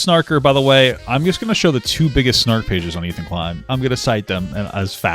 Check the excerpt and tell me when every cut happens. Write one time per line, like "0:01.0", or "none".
0:03.7